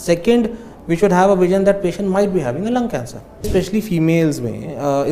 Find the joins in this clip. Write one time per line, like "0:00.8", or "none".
0:03.5